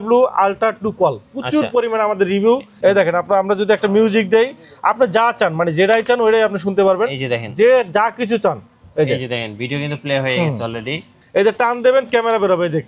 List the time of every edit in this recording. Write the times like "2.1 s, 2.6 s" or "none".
2.7 s, 11.1 s